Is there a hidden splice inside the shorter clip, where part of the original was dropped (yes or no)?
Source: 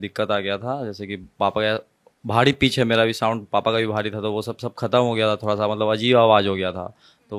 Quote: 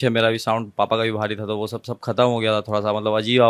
no